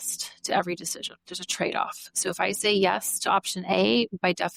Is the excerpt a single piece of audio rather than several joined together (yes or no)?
yes